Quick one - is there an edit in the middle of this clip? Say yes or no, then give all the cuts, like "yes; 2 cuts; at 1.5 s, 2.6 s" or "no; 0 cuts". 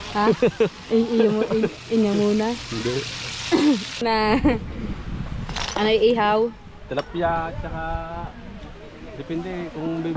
yes; 1 cut; at 3.9 s